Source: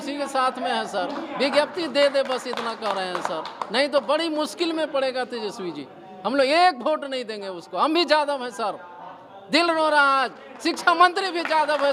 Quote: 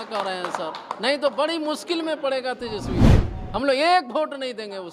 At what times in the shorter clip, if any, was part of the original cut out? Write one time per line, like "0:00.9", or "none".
none